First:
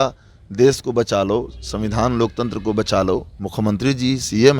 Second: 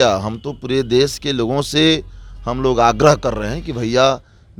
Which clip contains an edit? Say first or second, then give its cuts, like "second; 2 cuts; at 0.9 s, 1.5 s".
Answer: first; 1 cut; at 3.4 s